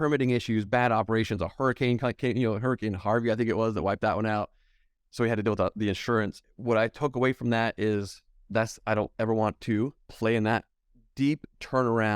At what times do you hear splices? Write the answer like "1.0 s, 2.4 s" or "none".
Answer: 6.4 s